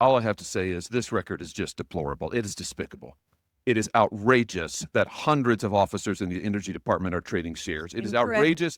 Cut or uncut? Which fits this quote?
uncut